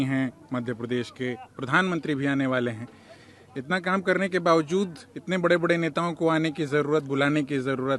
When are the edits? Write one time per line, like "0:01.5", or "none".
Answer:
none